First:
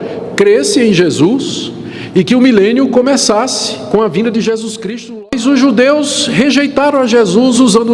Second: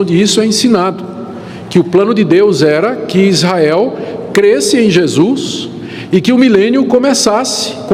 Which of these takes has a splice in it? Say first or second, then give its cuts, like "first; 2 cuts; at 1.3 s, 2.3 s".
first; 1 cut; at 5.2 s